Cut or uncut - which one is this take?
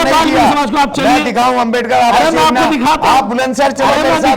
uncut